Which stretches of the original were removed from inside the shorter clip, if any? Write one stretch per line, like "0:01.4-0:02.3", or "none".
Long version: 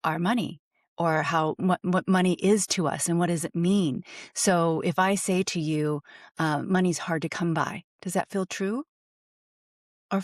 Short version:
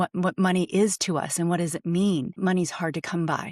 0:04.1-0:06.6